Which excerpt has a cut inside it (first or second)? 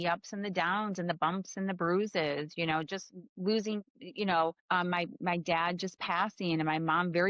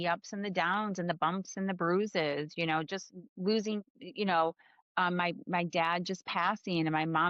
first